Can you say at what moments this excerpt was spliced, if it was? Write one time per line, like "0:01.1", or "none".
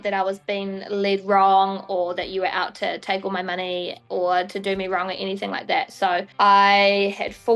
none